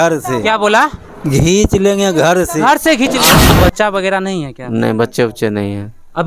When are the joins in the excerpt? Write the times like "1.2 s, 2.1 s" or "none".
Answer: 3.4 s